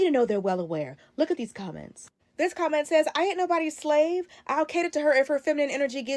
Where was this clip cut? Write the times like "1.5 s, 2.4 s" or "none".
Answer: 1.2 s